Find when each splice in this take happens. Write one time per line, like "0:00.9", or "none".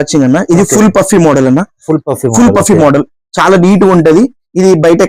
none